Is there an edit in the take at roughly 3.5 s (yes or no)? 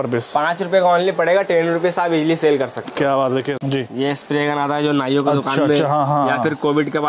yes